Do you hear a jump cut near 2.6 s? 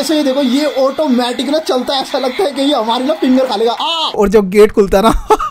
no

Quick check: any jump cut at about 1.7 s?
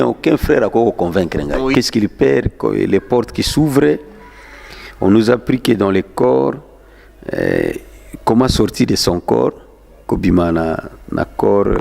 yes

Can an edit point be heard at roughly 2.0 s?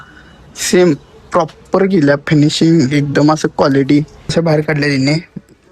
no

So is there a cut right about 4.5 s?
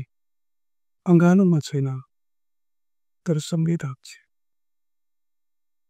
no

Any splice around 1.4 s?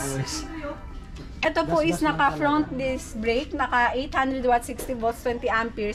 yes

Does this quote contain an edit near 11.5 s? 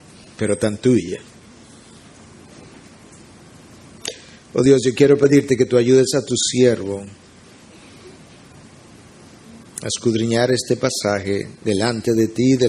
no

